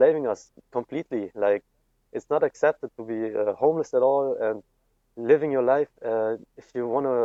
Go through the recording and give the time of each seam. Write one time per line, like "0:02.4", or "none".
none